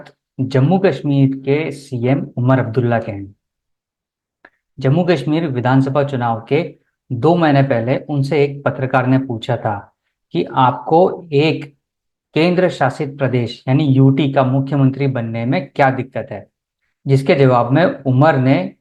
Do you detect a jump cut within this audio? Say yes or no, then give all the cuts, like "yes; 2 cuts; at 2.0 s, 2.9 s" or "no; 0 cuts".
no; 0 cuts